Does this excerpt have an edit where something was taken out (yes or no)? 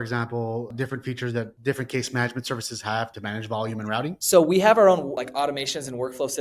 yes